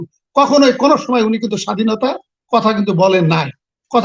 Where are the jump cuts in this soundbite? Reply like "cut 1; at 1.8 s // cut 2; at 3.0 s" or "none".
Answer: none